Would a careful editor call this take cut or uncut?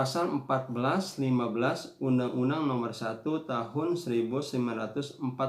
uncut